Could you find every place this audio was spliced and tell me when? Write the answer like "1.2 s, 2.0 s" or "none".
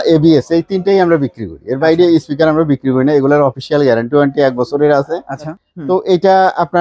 5.6 s